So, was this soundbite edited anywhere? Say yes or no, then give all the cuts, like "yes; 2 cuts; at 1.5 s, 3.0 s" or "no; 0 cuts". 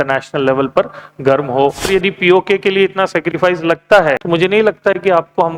yes; 2 cuts; at 1.9 s, 4.2 s